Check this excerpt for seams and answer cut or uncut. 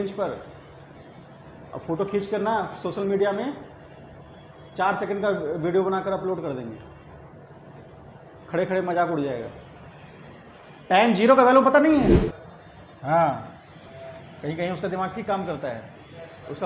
cut